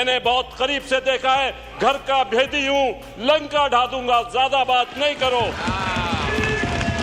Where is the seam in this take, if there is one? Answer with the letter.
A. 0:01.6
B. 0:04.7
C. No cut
C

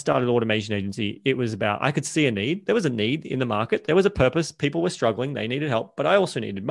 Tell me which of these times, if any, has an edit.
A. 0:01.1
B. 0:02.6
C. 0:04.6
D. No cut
B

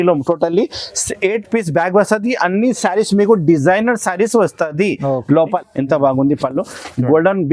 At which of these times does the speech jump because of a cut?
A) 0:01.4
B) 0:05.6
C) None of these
B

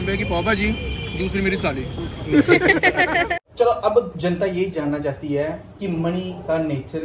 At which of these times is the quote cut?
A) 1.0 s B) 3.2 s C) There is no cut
B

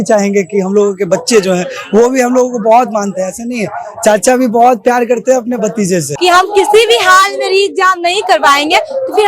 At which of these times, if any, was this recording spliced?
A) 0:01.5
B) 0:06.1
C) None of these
B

